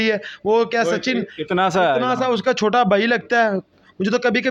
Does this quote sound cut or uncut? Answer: uncut